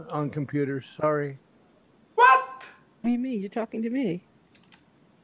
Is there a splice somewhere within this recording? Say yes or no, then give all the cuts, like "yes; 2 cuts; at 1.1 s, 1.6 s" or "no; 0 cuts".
no; 0 cuts